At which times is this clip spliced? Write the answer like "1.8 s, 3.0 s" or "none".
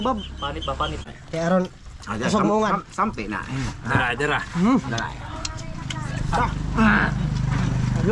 1.1 s